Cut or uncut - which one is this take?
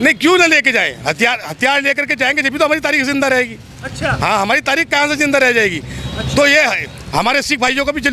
uncut